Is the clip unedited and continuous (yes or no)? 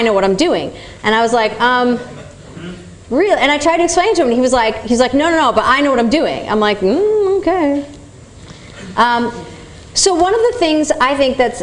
no